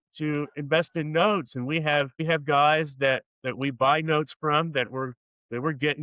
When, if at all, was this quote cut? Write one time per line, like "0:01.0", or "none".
0:02.2